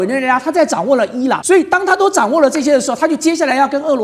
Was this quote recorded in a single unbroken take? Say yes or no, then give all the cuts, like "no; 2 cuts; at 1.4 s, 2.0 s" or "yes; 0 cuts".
no; 1 cut; at 1.4 s